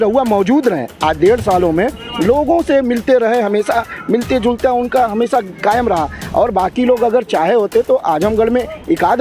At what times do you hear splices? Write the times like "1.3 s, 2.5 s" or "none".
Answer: none